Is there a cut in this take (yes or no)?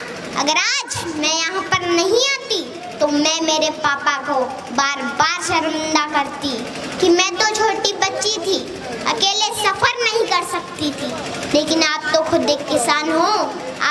no